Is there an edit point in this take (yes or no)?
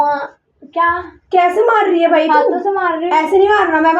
no